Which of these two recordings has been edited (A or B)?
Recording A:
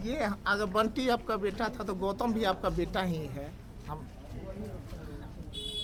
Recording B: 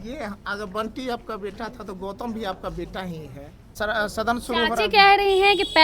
B